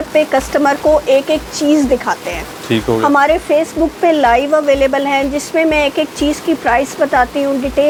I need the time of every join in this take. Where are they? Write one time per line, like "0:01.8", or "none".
none